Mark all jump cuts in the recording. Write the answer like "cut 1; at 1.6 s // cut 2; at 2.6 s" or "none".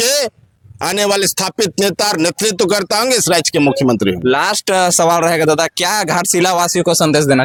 none